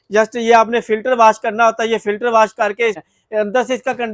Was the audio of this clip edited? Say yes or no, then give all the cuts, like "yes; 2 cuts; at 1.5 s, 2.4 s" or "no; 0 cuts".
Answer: yes; 1 cut; at 3.0 s